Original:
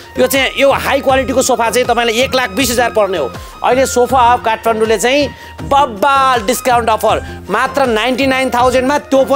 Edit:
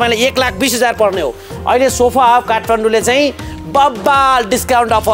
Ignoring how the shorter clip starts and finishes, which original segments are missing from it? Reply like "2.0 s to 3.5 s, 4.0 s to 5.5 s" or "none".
none